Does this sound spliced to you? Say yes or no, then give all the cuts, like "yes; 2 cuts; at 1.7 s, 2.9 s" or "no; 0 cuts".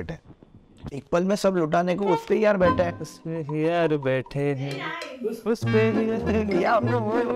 no; 0 cuts